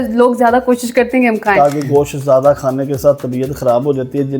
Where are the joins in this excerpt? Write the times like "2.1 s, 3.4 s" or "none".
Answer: 1.5 s